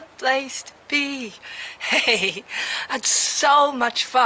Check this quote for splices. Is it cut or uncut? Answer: cut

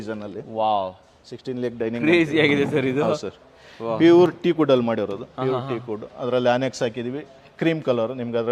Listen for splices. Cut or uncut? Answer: uncut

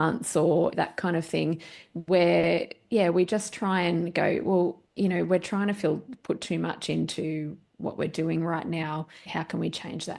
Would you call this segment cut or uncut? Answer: cut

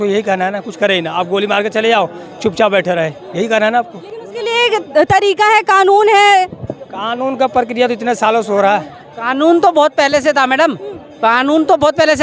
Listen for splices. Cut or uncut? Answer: uncut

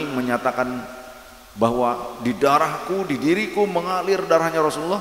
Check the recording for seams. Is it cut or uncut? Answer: uncut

